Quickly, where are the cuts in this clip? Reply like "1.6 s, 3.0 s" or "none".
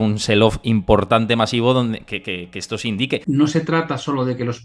3.2 s